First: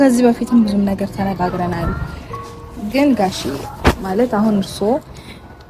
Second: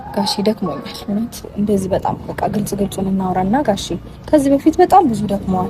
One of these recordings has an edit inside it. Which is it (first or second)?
second